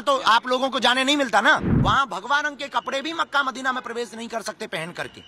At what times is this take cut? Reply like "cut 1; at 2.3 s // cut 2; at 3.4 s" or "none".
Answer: cut 1; at 1.7 s